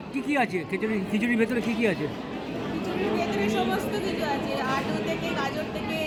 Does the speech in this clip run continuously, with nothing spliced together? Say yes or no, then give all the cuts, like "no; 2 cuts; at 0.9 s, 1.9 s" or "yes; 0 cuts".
yes; 0 cuts